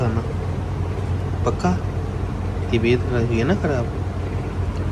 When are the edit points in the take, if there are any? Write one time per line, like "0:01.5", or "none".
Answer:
none